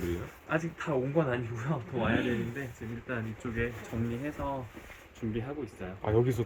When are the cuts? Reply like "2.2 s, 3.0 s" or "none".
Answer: none